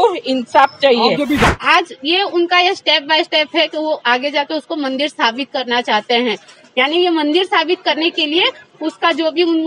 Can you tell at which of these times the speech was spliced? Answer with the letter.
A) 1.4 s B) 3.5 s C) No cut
A